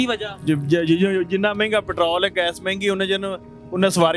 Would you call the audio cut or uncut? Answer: uncut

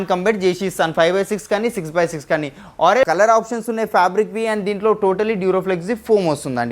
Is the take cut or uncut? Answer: cut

